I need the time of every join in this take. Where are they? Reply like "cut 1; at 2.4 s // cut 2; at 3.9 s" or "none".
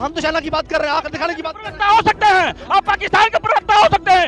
none